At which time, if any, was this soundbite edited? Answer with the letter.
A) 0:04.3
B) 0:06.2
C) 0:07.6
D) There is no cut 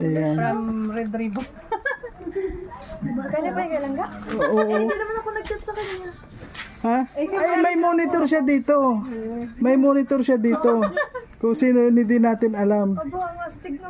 A